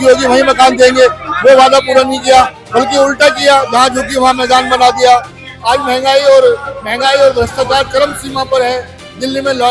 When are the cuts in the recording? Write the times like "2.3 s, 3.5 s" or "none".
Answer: none